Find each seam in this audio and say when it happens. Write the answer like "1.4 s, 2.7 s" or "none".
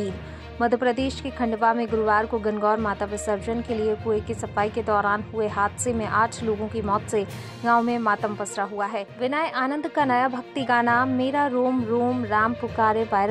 9.1 s